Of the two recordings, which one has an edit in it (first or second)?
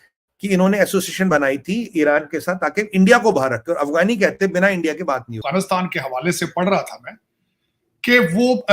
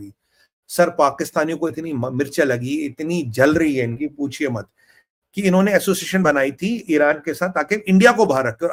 first